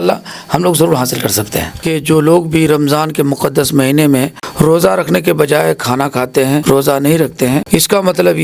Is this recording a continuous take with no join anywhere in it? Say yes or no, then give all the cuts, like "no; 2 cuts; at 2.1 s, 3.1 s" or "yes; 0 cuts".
no; 4 cuts; at 1.9 s, 4.4 s, 6.6 s, 7.6 s